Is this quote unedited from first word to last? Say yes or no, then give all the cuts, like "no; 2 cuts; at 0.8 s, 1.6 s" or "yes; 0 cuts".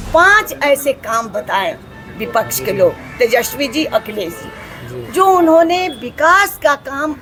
yes; 0 cuts